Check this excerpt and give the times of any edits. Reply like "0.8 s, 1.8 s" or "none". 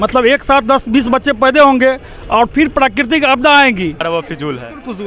4.0 s